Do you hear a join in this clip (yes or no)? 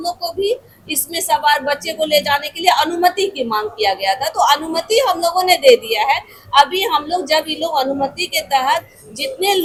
no